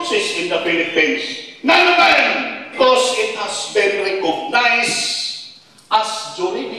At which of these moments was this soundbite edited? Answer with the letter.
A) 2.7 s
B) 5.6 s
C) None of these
A